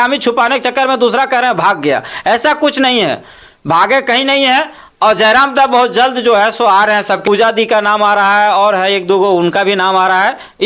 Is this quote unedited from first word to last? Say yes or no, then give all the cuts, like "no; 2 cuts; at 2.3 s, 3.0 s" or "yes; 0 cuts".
no; 1 cut; at 7.2 s